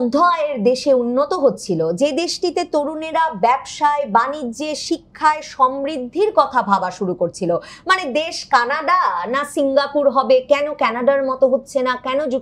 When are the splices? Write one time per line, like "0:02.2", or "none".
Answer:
none